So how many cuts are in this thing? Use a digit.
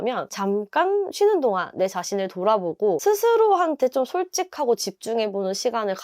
1